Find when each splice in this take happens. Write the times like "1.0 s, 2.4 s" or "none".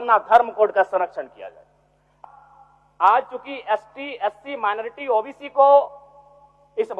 2.1 s